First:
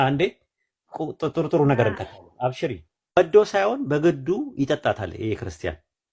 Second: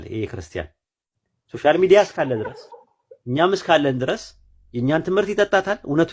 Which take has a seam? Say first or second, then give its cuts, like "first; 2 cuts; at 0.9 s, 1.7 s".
first; 1 cut; at 3.2 s